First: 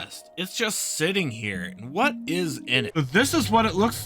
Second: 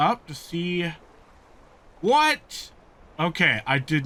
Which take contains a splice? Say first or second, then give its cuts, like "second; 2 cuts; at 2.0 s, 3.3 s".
first; 1 cut; at 2.9 s